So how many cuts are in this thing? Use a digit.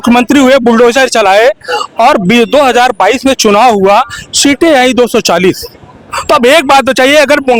0